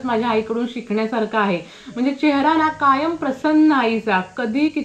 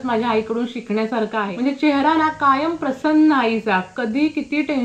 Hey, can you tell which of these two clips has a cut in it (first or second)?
second